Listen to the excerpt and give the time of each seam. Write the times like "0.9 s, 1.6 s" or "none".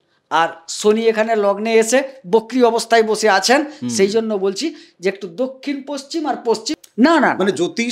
6.8 s